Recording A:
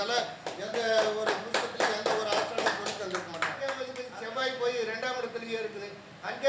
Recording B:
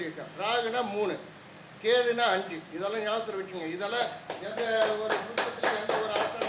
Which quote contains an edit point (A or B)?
A